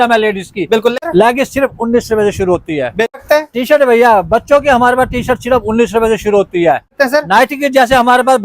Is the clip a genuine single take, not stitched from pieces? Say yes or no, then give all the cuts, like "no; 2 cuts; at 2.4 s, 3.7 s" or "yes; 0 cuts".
no; 3 cuts; at 1.0 s, 3.2 s, 6.9 s